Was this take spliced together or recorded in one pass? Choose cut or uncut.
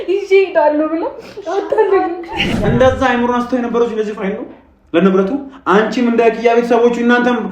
cut